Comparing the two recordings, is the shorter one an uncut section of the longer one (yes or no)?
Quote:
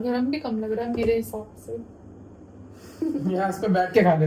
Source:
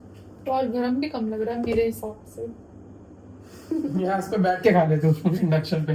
yes